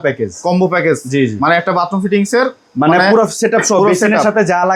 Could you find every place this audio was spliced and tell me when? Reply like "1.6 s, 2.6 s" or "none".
none